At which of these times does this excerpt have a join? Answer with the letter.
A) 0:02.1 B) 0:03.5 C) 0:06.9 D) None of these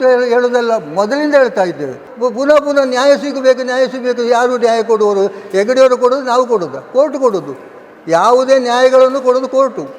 A